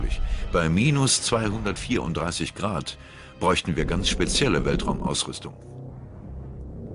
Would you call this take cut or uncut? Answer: cut